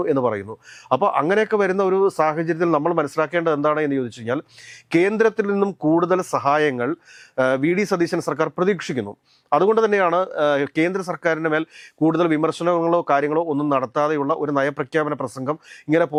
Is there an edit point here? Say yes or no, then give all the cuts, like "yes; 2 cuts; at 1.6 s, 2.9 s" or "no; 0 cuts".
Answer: no; 0 cuts